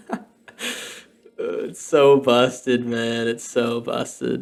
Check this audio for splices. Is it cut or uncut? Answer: uncut